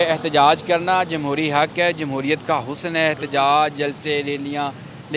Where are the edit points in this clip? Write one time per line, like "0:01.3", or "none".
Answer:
none